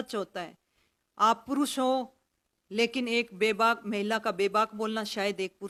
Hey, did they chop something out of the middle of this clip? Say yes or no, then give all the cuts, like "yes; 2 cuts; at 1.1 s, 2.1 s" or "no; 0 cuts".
no; 0 cuts